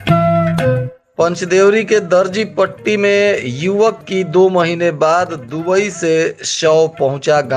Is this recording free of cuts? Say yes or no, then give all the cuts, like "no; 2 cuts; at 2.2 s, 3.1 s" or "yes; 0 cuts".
no; 1 cut; at 1.0 s